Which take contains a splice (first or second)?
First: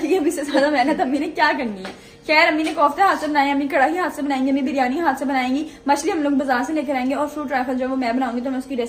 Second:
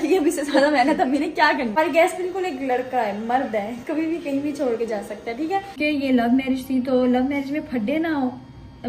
second